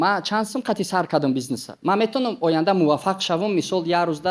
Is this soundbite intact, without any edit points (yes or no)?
yes